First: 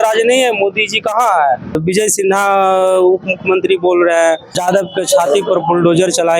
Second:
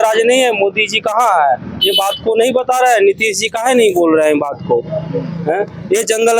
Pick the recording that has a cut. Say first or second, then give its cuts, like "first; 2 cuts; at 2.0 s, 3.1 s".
first; 2 cuts; at 1.8 s, 4.5 s